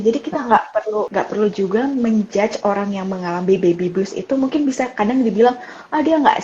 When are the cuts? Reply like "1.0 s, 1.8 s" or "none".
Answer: 1.1 s